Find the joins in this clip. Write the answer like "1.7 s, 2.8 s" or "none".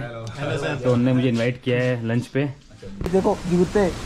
3.1 s